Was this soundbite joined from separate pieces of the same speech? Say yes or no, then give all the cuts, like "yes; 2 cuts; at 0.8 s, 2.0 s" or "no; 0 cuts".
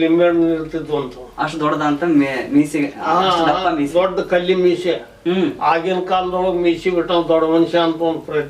no; 0 cuts